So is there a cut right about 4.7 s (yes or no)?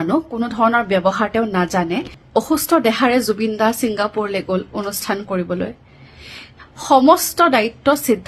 no